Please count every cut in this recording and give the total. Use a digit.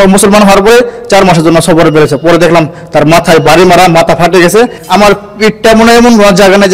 1